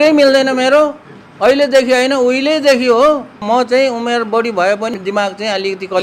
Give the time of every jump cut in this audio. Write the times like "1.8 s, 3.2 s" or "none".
3.3 s, 4.9 s